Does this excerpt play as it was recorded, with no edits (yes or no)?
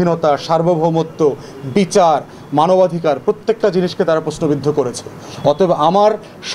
yes